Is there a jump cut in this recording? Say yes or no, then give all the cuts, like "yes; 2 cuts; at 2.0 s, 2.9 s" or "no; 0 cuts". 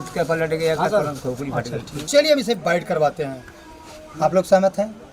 yes; 1 cut; at 2.1 s